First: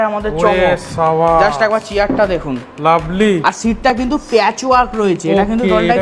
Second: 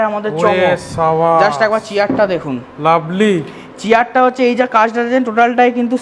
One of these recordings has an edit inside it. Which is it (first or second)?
first